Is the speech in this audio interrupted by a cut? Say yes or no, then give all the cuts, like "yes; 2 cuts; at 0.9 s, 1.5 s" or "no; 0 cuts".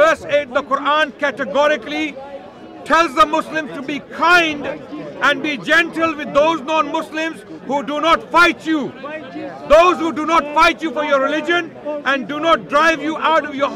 no; 0 cuts